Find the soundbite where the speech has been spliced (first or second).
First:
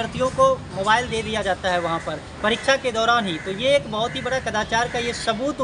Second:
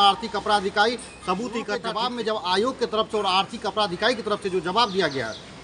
second